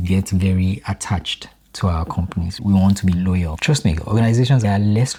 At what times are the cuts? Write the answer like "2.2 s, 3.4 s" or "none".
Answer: none